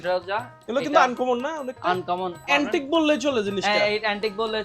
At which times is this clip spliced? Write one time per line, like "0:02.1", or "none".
0:02.4